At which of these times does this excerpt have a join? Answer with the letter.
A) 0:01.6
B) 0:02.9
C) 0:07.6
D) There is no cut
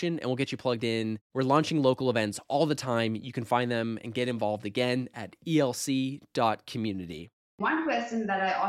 C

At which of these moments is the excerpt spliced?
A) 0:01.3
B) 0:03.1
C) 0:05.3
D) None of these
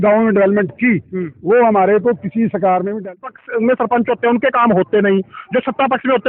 B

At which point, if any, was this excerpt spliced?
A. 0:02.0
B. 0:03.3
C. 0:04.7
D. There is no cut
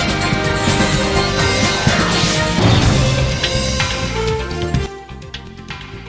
D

